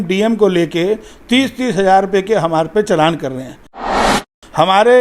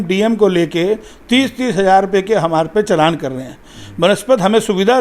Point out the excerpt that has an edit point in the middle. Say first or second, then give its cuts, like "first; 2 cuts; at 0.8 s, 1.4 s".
first; 1 cut; at 3.8 s